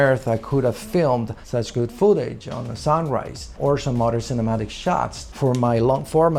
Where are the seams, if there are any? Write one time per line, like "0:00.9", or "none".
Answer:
none

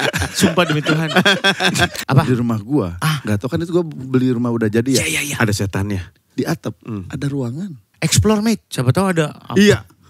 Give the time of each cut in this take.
0:02.0
0:07.9

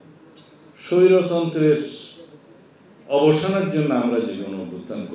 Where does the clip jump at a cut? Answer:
none

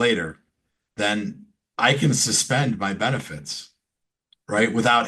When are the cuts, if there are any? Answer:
none

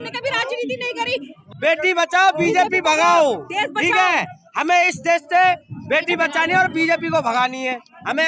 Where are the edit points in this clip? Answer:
0:01.4

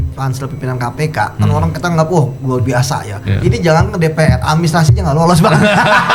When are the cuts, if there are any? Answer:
none

